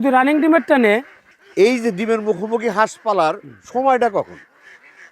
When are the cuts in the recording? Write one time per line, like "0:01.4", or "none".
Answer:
0:01.4